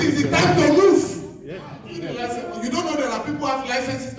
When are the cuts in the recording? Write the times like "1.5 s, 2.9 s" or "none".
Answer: 2.2 s